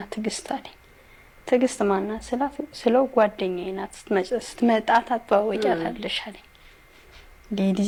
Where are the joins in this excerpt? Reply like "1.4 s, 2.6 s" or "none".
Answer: none